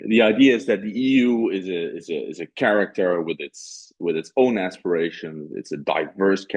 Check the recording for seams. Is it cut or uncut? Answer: uncut